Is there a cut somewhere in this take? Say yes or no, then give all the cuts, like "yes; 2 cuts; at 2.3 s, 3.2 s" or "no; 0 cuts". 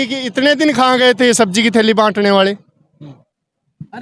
no; 0 cuts